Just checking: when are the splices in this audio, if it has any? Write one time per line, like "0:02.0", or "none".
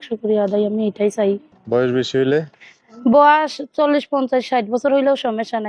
0:01.5